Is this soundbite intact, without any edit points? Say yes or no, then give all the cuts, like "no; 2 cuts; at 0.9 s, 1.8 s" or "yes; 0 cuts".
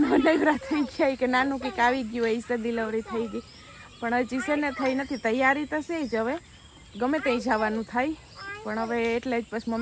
yes; 0 cuts